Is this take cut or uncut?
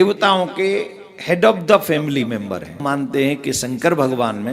cut